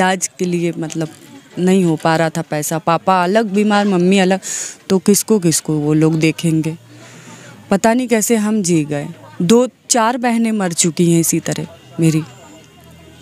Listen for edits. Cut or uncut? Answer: uncut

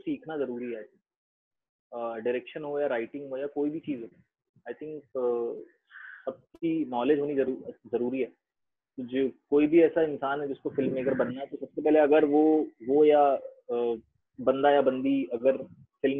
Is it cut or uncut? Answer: uncut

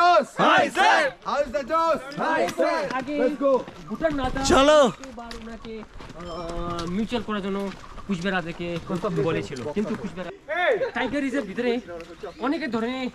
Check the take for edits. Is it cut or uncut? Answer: uncut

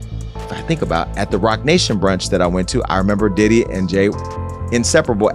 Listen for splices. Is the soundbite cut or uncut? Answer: uncut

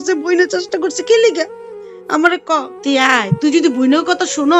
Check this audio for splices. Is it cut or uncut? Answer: cut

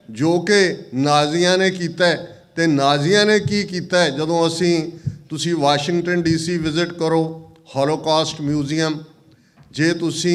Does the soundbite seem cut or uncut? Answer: uncut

